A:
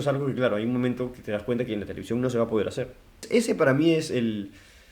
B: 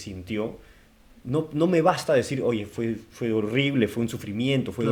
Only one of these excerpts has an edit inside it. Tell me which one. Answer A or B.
A